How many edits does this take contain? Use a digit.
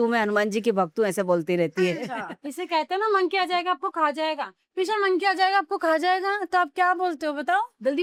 0